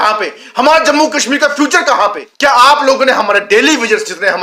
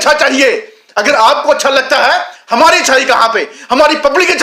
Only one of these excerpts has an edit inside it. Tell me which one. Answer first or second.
first